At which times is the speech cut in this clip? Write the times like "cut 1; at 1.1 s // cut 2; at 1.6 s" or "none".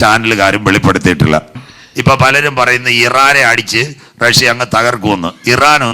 cut 1; at 1.5 s